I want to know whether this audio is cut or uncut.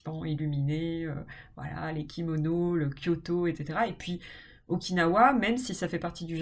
uncut